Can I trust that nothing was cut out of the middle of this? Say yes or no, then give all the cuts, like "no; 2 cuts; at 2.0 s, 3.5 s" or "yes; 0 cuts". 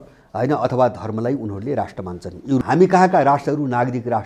no; 1 cut; at 2.6 s